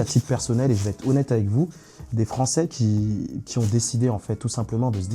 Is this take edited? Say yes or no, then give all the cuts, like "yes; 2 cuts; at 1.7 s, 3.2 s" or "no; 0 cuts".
no; 0 cuts